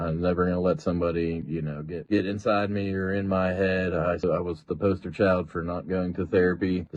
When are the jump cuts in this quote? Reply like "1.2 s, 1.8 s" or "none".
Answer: 4.2 s